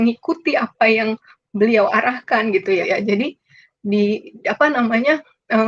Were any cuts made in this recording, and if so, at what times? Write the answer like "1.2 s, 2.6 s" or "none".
2.8 s